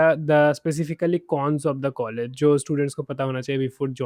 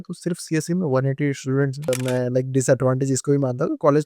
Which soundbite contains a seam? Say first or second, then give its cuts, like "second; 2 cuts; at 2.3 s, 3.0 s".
second; 1 cut; at 1.9 s